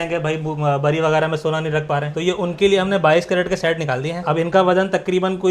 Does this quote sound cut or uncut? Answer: uncut